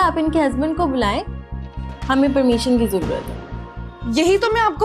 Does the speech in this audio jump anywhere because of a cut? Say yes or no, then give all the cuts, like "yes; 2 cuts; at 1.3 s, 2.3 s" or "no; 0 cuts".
no; 0 cuts